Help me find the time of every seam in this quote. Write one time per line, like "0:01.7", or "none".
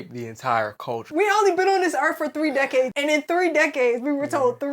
0:01.1
0:02.9